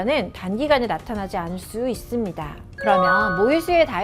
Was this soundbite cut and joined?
yes; 1 cut; at 2.6 s

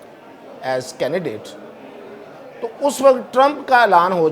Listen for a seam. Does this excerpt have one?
no; 0 cuts

